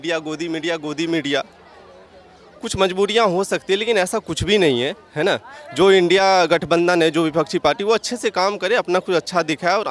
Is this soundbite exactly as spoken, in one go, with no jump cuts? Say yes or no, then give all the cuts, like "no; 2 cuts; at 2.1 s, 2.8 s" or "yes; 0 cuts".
yes; 0 cuts